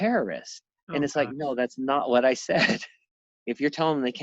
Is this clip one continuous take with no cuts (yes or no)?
no